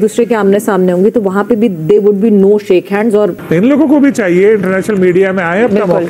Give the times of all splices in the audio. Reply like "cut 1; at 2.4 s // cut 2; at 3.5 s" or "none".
cut 1; at 3.4 s